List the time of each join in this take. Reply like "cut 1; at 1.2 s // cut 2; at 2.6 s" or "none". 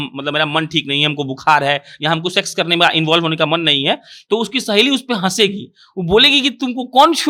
none